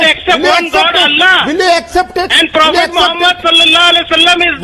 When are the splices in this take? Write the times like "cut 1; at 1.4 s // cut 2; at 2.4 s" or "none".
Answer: none